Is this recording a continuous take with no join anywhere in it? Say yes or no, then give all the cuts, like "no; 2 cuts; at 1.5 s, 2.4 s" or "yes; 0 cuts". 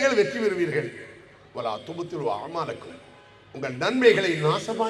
yes; 0 cuts